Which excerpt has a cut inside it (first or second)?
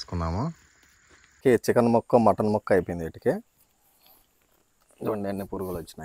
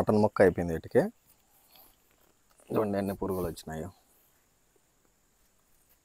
first